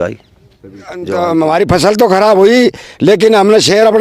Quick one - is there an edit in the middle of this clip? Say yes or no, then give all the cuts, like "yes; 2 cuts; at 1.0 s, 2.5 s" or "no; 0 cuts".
yes; 1 cut; at 1.1 s